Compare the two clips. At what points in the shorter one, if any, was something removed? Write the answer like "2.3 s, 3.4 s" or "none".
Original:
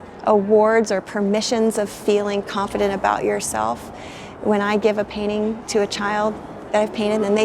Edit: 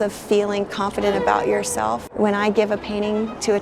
2.1 s